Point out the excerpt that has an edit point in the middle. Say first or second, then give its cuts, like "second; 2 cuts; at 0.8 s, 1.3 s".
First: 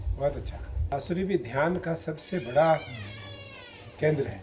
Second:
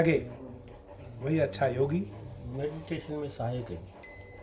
first; 1 cut; at 0.9 s